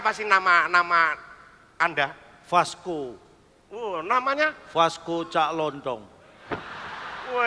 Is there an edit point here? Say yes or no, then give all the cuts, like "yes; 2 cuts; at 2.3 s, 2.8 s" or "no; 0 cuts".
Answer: no; 0 cuts